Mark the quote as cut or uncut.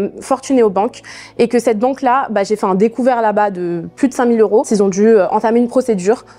uncut